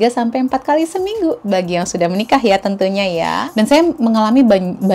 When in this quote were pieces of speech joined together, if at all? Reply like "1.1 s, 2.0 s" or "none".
3.4 s